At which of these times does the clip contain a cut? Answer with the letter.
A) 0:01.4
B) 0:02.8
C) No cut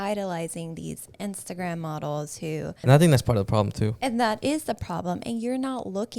B